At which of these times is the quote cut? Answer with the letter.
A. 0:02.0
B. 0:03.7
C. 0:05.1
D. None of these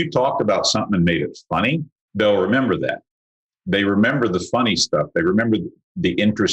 A